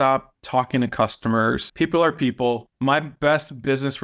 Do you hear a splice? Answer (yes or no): yes